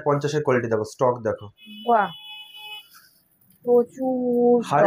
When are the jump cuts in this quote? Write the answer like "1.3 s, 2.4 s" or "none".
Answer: none

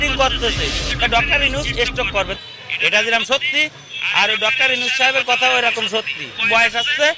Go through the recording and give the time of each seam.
2.3 s, 6.4 s

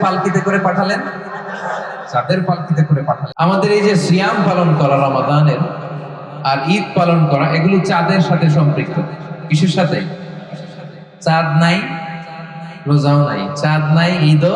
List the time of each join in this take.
3.3 s

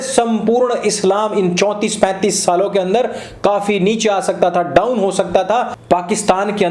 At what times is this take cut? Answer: 5.8 s

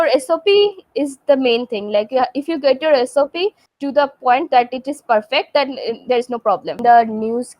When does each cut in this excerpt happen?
3.7 s, 6.8 s

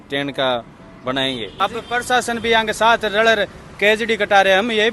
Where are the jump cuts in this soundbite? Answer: 1.5 s

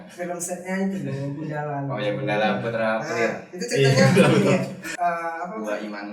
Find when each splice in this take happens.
4.9 s

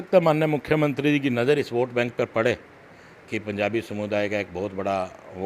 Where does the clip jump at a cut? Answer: 1.0 s

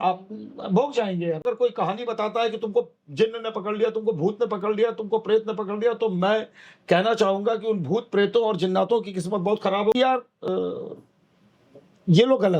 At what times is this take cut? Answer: 1.4 s, 9.9 s

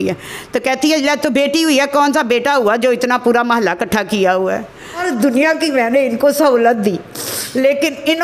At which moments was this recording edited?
5.0 s

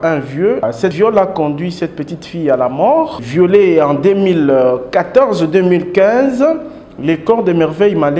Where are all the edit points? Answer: 0.9 s, 3.2 s

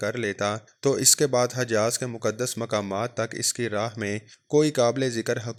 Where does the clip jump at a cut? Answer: none

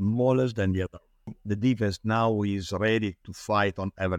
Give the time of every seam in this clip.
1.4 s

